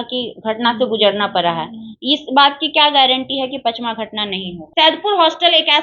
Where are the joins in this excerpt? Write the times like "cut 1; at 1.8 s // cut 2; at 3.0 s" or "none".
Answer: cut 1; at 4.6 s